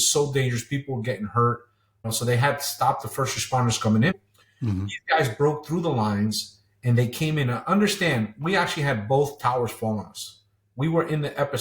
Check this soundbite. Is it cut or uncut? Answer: cut